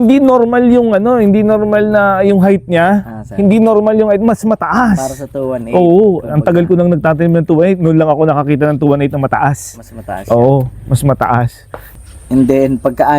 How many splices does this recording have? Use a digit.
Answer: 1